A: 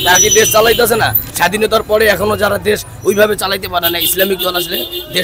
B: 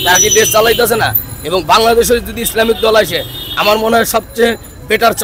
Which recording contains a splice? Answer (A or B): A